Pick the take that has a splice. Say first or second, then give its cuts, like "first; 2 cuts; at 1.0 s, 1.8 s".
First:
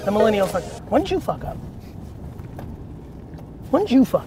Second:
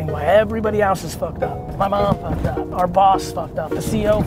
second; 2 cuts; at 1.6 s, 2.7 s